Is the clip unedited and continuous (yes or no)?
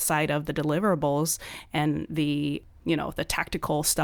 yes